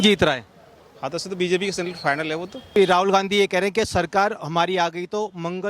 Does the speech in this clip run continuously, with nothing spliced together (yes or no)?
no